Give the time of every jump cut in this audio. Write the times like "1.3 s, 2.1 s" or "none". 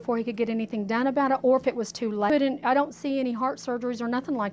2.3 s